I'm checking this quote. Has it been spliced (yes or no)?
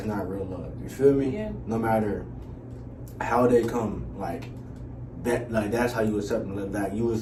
no